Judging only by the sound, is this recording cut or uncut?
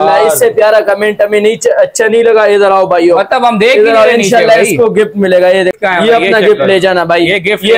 cut